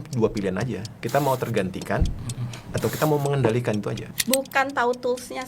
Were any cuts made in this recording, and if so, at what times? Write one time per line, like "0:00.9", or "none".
0:00.9
0:04.0